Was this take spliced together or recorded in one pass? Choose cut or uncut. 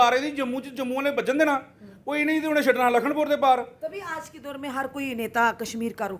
uncut